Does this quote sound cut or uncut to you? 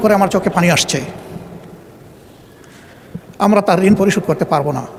uncut